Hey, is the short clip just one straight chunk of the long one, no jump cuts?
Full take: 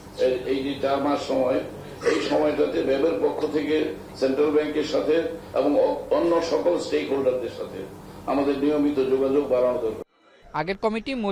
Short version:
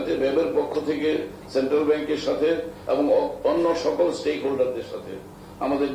yes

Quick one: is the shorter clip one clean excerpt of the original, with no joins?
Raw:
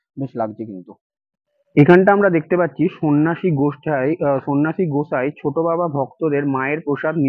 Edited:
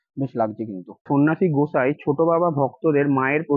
no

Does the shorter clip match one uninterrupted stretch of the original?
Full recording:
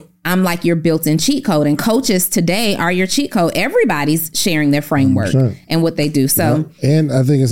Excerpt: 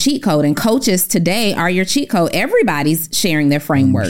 yes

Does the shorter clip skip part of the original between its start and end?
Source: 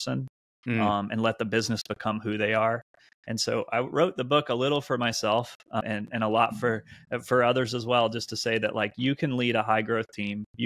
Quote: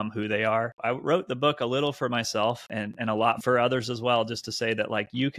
yes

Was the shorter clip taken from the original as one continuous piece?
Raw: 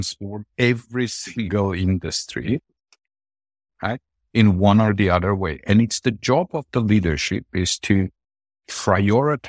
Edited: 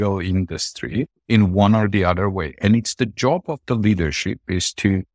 no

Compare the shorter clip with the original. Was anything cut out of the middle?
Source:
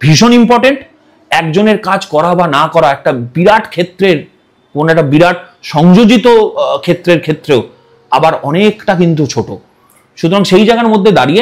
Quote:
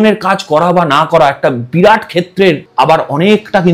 yes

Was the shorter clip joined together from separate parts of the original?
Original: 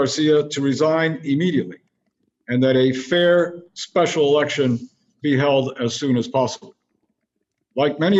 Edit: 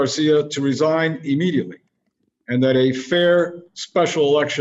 no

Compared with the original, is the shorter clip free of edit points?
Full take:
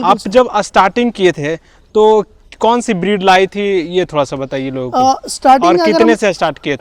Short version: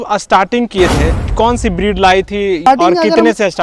no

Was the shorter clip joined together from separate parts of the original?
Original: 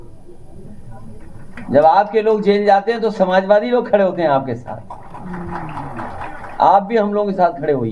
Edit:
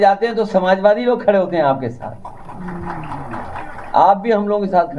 no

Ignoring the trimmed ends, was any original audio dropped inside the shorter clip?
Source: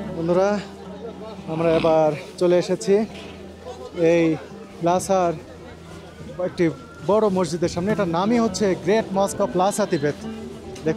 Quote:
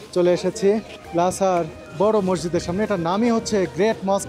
yes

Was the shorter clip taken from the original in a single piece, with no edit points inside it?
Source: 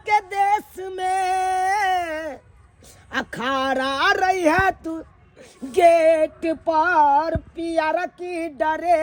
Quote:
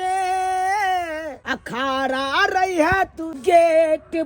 no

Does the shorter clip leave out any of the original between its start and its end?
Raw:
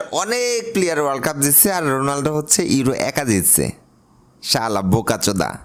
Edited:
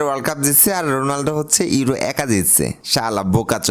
yes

